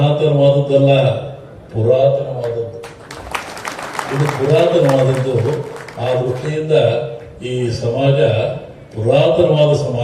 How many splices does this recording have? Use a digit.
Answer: 0